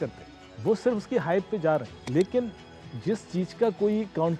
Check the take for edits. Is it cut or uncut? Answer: cut